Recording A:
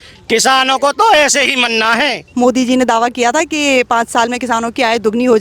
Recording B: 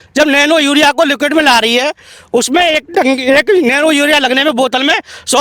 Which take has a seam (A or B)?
A